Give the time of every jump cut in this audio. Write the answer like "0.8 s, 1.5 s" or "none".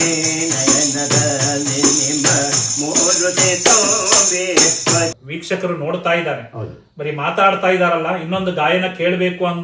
5.1 s